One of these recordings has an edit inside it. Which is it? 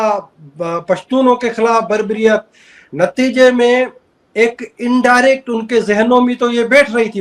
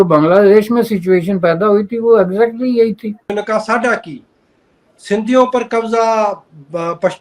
second; 1 cut; at 3.4 s

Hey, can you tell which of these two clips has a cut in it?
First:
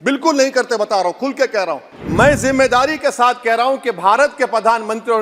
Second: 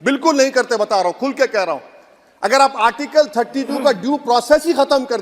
first; 1 cut; at 1.9 s

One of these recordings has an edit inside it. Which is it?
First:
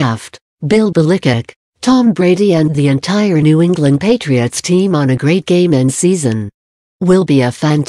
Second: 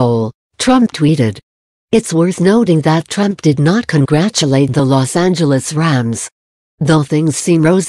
second; 1 cut; at 6.9 s

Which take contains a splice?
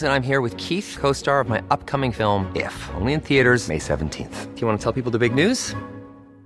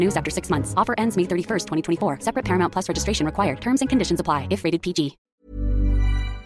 second; 1 cut; at 5.3 s

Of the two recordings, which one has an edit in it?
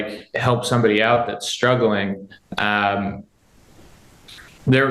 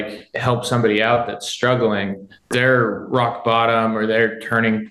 second; 1 cut; at 2.4 s

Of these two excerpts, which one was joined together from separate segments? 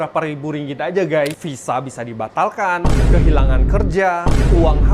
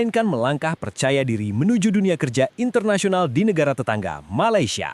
first; 1 cut; at 1.4 s

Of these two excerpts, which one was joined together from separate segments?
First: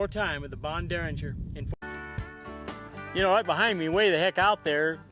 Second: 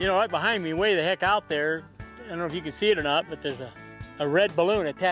first; 1 cut; at 1.6 s

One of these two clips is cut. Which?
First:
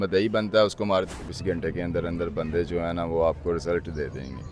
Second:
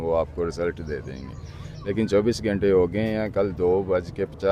first; 1 cut; at 1.2 s

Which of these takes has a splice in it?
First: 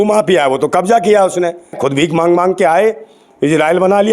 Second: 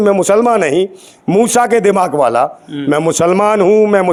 first; 1 cut; at 1.8 s

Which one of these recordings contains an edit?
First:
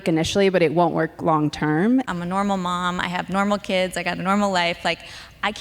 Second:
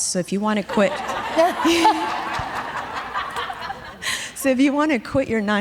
first; 1 cut; at 2.1 s

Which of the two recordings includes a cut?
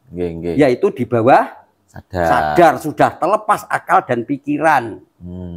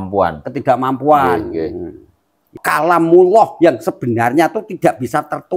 second; 1 cut; at 2.6 s

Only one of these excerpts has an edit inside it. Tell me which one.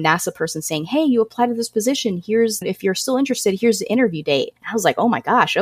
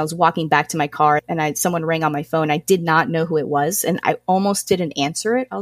first; 1 cut; at 4.6 s

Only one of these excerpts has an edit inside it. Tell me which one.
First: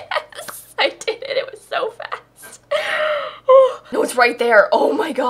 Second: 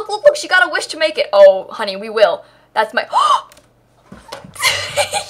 first; 1 cut; at 3.9 s

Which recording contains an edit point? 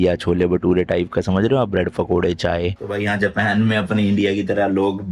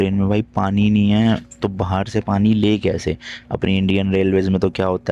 first; 1 cut; at 2.8 s

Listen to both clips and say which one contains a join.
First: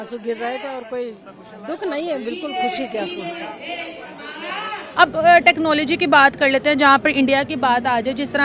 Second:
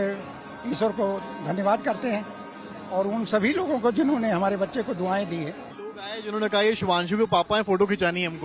first; 1 cut; at 4.8 s

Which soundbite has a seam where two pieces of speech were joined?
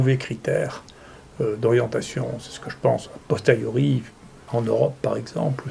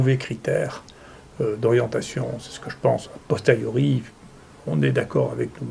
first; 1 cut; at 4.4 s

